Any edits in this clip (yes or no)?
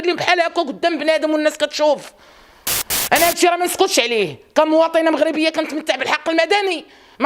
no